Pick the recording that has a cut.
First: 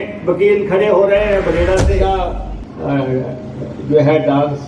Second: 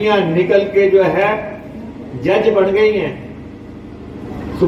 first; 1 cut; at 2.0 s

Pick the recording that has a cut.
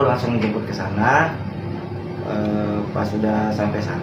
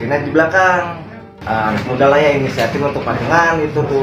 second; 1 cut; at 1.3 s

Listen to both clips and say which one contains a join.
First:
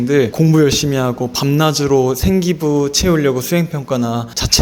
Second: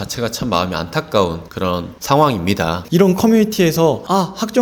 second; 2 cuts; at 1.6 s, 2.8 s

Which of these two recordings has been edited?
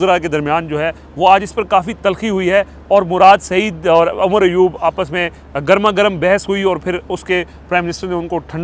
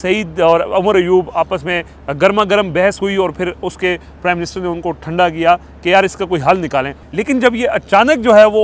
second; 1 cut; at 7.0 s

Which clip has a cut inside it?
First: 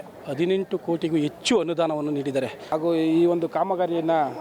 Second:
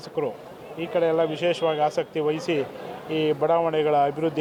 first; 1 cut; at 2.6 s

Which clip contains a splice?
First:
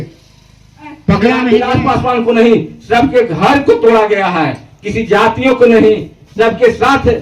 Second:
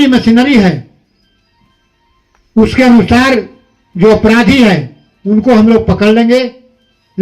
first; 1 cut; at 1.5 s

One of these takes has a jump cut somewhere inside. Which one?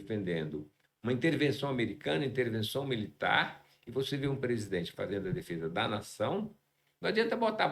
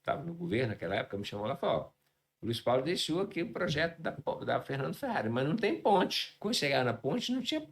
second; 1 cut; at 6.3 s

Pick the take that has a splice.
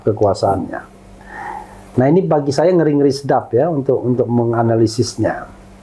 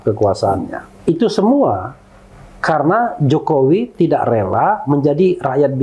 second; 1 cut; at 0.9 s

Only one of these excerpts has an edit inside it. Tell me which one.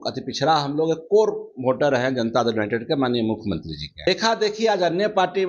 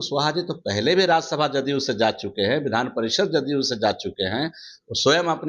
first; 1 cut; at 4.1 s

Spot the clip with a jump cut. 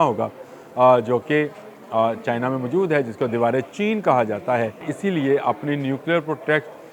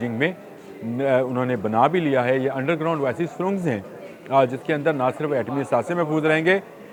first; 1 cut; at 4.9 s

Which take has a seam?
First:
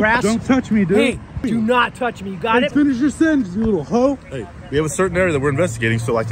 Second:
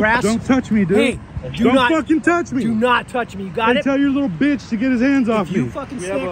first; 2 cuts; at 1.4 s, 2.7 s

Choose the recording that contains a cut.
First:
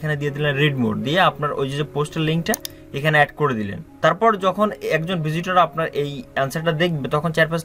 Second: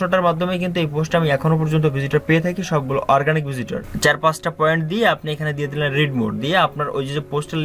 second; 1 cut; at 3.8 s

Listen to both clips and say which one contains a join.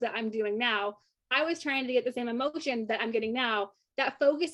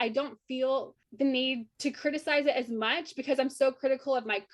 second; 2 cuts; at 1.0 s, 1.7 s

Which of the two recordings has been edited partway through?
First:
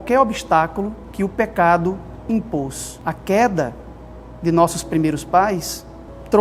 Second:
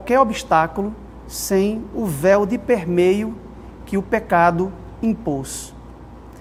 first; 2 cuts; at 1.0 s, 2.9 s

